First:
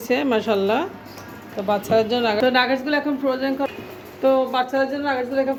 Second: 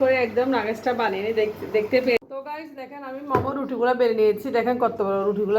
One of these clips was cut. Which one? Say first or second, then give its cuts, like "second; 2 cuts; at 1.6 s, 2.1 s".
second; 1 cut; at 2.2 s